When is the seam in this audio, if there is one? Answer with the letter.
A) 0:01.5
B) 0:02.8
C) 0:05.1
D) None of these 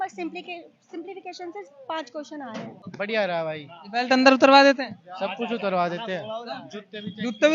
B